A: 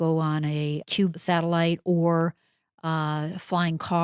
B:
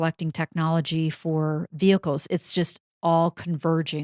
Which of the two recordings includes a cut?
A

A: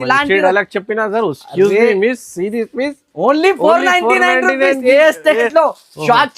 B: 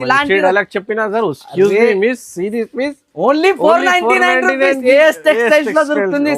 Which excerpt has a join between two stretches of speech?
A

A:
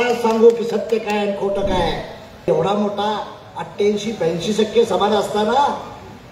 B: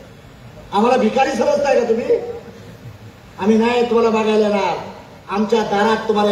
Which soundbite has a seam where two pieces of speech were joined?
A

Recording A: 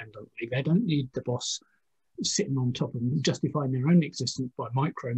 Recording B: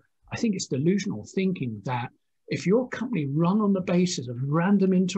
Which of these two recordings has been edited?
A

